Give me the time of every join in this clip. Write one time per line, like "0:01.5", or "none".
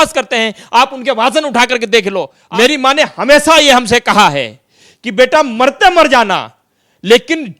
0:02.4